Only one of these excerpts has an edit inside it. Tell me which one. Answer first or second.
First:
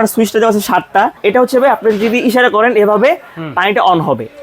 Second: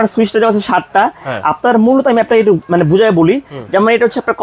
first